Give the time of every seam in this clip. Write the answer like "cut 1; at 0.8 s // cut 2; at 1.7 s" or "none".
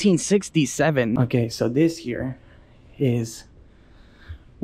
cut 1; at 1.1 s